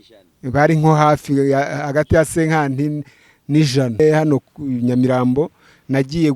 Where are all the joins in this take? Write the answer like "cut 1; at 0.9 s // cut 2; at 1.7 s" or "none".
cut 1; at 4.0 s